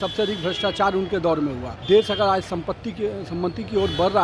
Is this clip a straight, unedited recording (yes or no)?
no